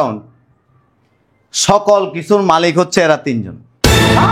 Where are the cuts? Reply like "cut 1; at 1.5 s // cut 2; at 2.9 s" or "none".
none